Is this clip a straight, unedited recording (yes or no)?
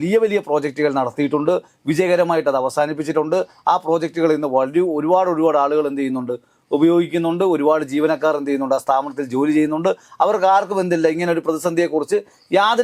yes